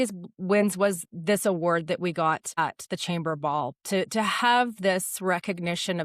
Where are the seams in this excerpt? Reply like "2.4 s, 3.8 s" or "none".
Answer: 2.6 s